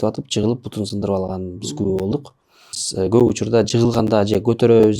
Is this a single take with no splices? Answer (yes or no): no